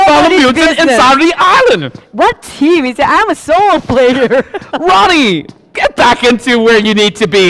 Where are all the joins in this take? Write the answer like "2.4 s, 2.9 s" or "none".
none